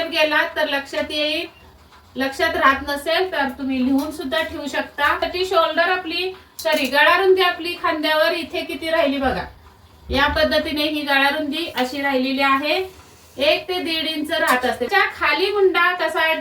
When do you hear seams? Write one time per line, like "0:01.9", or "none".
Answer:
0:05.2
0:14.9